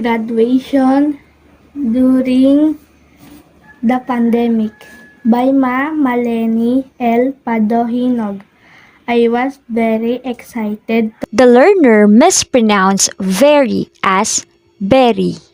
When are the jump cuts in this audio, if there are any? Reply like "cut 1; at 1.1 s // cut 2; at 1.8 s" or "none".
none